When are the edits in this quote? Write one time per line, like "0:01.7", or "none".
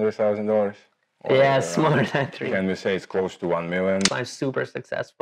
0:02.3
0:04.1